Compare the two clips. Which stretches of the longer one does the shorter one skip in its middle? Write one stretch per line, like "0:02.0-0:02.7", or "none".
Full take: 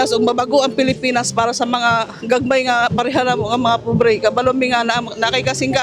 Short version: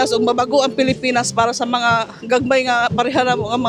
none